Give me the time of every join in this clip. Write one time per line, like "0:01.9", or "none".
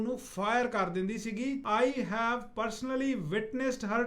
0:01.6